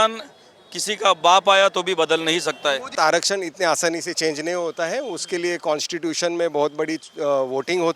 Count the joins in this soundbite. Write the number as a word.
one